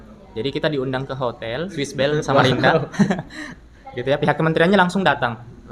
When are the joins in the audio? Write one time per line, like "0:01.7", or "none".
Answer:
none